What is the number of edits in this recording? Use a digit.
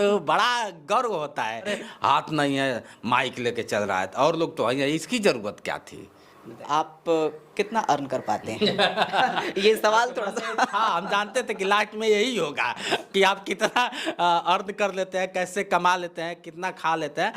2